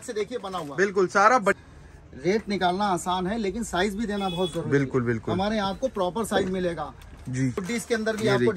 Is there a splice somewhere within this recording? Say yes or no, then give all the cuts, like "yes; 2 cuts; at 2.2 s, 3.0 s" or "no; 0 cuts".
yes; 2 cuts; at 1.6 s, 7.6 s